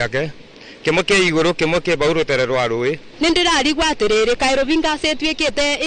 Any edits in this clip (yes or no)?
yes